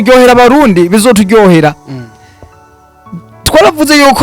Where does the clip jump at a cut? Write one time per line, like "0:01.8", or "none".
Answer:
none